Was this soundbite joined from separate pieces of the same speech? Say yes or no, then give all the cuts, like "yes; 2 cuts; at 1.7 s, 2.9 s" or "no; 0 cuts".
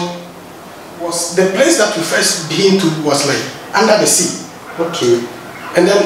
yes; 1 cut; at 1.2 s